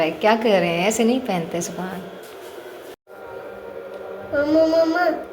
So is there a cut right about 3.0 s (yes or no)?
yes